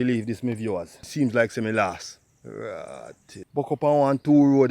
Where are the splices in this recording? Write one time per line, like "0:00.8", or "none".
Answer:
0:01.1
0:03.5